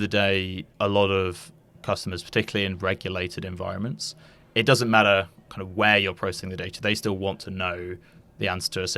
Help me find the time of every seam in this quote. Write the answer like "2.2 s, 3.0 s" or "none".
none